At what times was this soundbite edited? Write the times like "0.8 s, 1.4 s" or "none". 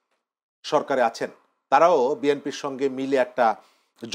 none

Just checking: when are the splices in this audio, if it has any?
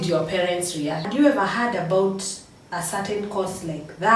1.0 s

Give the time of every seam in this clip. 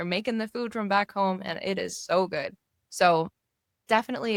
none

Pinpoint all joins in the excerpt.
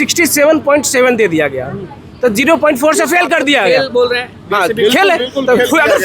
none

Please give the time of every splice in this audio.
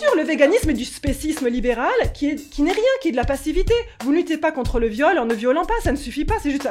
none

